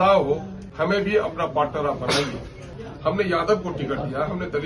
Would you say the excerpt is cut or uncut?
cut